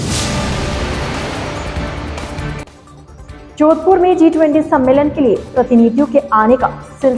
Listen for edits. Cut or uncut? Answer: uncut